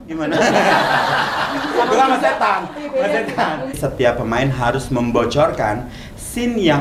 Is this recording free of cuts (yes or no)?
no